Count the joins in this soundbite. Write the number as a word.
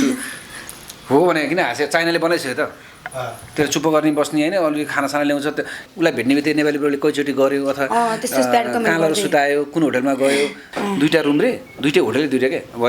two